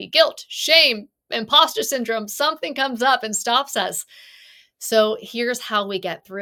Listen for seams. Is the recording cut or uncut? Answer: uncut